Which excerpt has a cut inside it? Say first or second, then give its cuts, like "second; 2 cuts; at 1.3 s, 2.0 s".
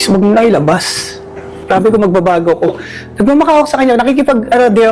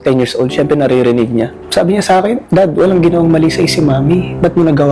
second; 1 cut; at 1.6 s